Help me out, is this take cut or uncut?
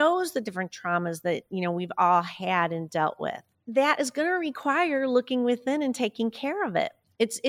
cut